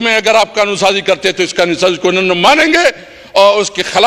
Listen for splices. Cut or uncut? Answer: uncut